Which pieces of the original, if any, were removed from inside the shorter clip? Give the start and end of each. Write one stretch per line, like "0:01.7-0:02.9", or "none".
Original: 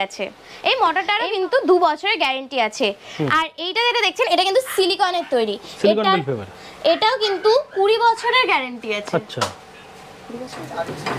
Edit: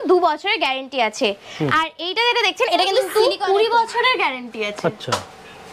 0:04.7-0:07.4